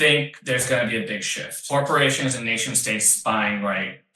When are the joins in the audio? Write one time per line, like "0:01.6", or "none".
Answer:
0:01.7